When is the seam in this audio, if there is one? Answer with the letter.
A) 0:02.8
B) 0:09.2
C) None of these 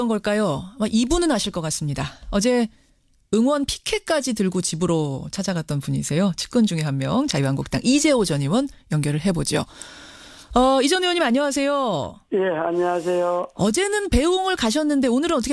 C